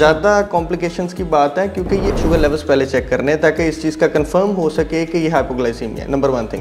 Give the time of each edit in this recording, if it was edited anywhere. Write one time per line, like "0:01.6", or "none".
0:02.2